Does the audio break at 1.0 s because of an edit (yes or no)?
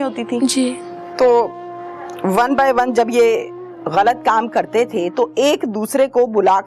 yes